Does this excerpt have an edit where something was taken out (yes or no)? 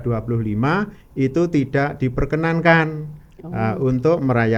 no